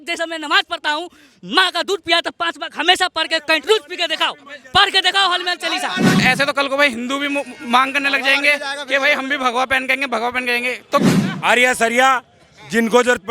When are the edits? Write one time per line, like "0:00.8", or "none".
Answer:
0:06.2
0:11.1